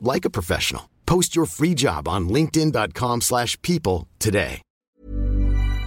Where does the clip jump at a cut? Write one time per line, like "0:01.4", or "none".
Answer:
0:04.7